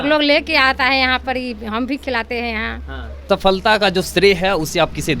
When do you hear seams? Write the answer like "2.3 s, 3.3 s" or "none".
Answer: 3.2 s